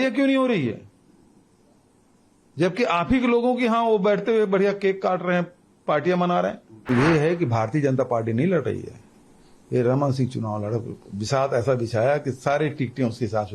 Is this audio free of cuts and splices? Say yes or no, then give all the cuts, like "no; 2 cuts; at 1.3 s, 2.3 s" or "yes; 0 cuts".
no; 1 cut; at 6.9 s